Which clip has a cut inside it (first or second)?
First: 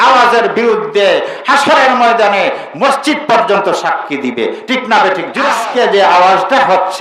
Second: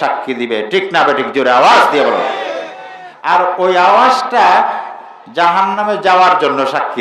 first